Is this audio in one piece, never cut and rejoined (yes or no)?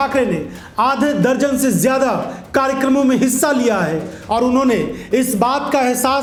yes